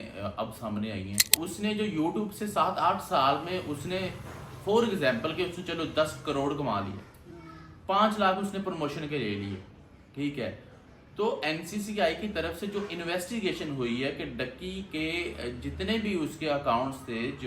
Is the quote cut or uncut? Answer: cut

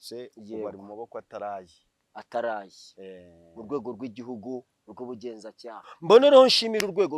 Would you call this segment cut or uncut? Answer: cut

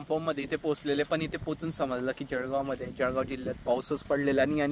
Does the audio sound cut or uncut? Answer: uncut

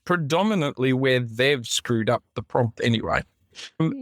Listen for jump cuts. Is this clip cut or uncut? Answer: uncut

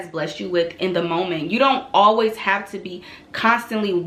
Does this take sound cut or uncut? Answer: uncut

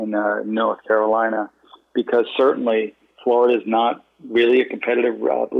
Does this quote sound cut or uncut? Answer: cut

